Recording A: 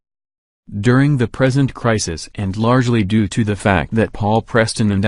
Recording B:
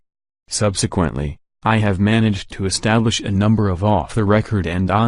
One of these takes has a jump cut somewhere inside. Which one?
A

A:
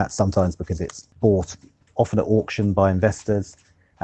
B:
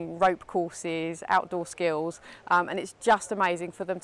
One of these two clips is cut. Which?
A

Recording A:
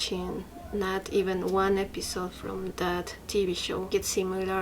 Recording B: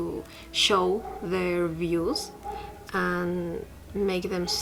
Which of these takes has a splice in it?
A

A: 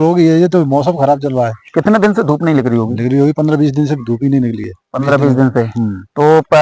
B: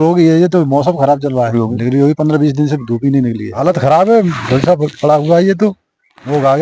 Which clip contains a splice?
B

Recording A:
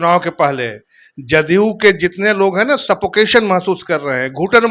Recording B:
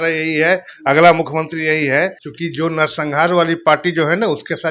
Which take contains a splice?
B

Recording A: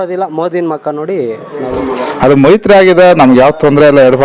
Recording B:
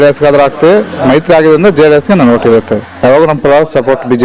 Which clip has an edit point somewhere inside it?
A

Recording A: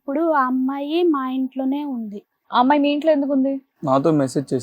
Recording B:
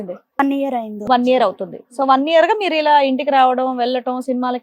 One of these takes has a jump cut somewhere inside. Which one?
A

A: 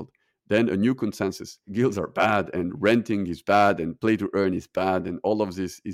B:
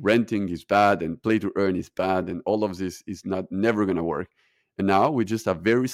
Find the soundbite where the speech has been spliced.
A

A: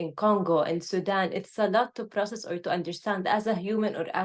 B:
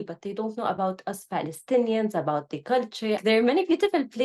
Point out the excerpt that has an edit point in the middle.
B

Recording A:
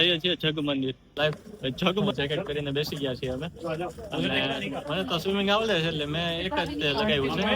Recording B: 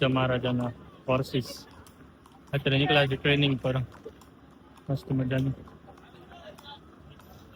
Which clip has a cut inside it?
A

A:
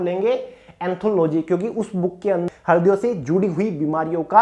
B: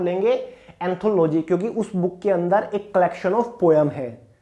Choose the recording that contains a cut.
A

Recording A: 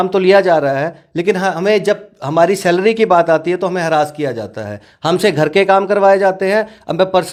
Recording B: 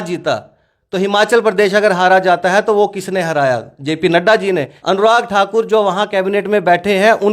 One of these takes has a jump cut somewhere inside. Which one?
B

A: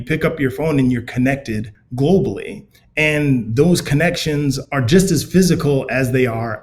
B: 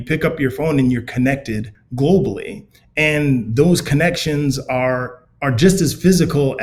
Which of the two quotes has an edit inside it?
A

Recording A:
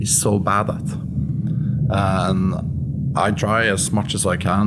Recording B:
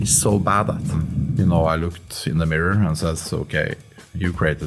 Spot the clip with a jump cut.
B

